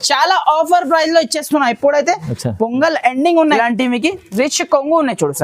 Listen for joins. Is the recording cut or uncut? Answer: cut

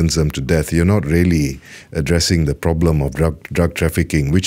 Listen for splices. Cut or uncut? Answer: uncut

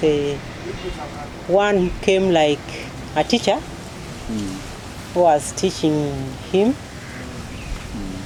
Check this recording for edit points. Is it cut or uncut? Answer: uncut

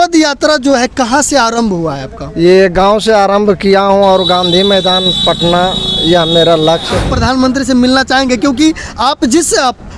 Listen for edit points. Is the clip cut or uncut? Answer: cut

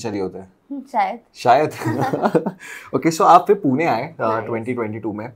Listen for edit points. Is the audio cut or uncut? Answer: uncut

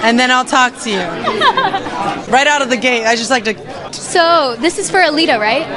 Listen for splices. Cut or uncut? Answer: cut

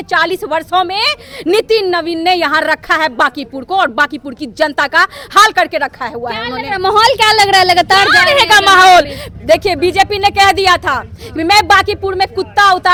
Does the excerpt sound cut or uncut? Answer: uncut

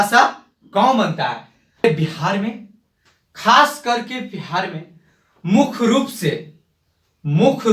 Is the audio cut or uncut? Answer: cut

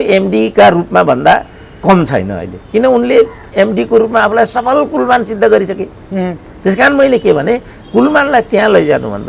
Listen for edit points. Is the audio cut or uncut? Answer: uncut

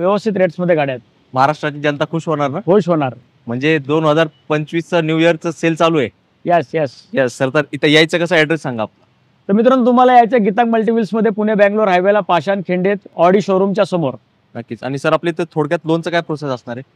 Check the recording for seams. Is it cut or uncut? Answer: uncut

